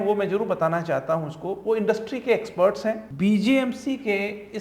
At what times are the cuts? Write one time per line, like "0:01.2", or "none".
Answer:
0:03.1